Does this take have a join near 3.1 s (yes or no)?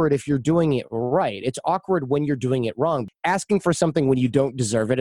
yes